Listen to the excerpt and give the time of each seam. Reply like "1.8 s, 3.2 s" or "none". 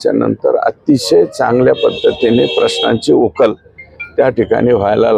none

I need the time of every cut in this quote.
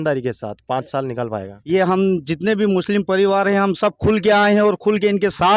1.5 s

